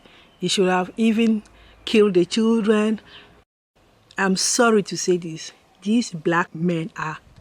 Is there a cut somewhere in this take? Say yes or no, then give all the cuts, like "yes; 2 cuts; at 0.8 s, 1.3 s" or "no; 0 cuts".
yes; 2 cuts; at 3.5 s, 6.5 s